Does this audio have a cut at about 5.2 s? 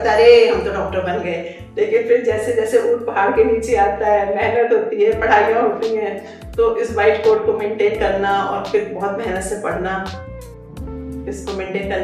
no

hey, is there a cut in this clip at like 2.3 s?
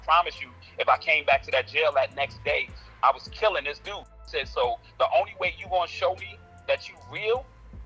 no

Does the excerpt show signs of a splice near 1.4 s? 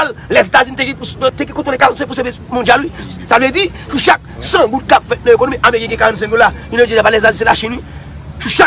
yes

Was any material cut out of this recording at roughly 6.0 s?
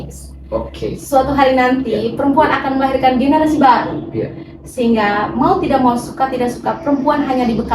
no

